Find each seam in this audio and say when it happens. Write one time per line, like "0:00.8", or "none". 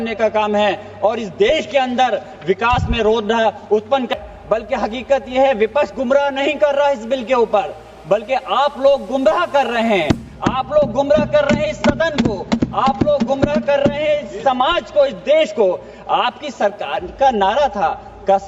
0:04.1